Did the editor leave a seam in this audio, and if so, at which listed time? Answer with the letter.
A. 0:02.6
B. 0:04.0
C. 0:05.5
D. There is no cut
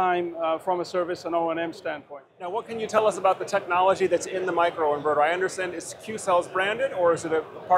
A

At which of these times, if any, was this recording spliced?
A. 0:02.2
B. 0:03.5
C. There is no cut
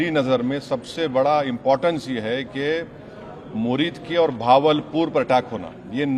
C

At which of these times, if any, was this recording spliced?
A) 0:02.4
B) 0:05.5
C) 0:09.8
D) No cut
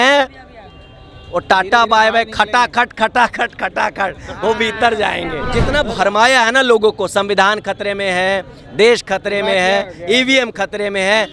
B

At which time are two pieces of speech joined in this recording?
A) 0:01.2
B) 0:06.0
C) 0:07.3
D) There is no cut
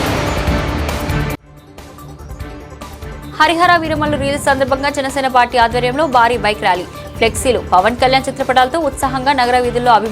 A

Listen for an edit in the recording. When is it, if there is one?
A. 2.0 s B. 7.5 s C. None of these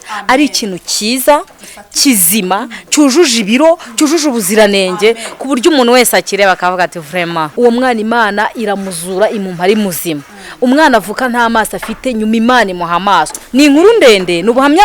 B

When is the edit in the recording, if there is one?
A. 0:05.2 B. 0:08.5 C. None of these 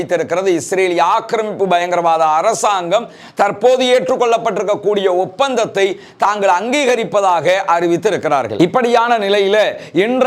B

